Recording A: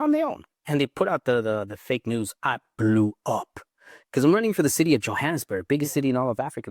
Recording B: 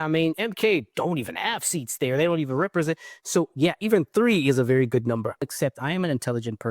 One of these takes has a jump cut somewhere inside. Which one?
B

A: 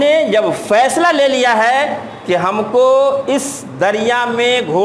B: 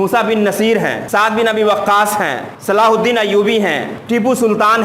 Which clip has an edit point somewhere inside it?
B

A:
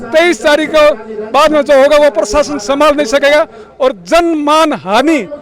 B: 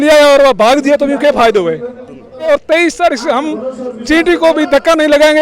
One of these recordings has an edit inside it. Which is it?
B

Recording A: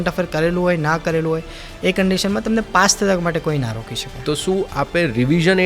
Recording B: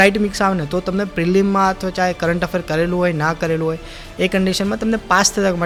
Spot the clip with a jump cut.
A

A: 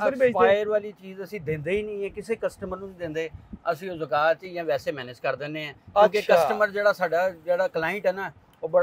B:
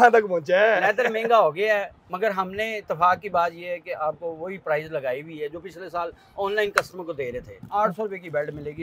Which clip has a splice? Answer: B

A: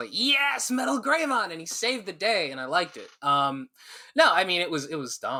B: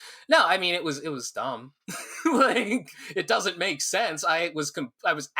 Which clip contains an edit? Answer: B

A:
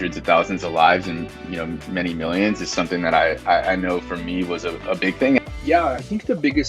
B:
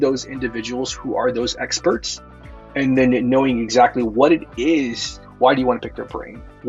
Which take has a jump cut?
A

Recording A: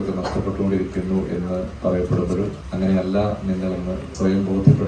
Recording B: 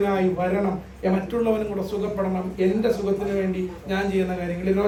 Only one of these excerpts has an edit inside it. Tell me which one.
A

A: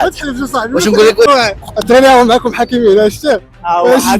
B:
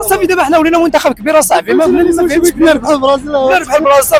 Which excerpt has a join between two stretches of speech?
A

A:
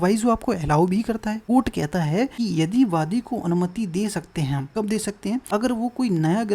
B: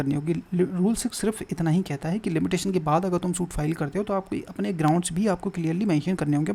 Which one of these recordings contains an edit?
A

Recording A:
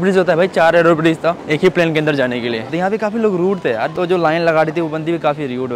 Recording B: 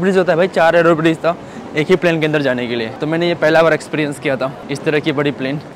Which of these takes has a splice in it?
A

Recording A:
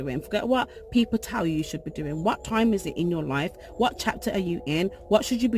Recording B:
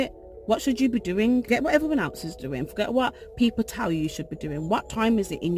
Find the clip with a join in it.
B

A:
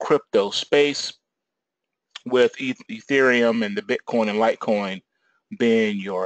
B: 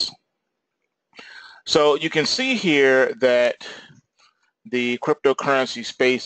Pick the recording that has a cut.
A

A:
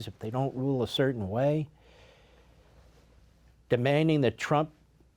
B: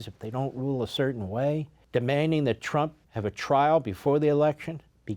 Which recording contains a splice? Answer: B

